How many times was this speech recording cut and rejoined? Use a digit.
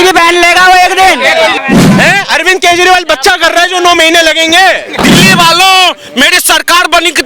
2